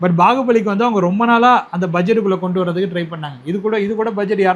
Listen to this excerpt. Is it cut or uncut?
uncut